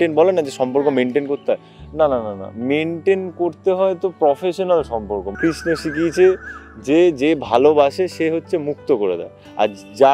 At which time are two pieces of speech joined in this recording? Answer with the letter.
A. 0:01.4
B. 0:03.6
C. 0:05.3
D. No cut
C